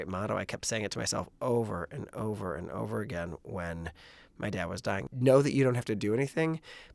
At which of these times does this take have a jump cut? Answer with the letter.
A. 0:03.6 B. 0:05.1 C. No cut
B